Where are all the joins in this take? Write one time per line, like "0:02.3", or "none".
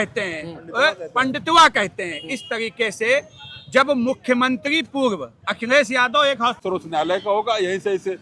0:06.6